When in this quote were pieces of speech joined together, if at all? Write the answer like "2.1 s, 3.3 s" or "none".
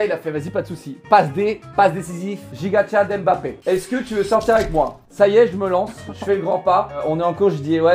3.5 s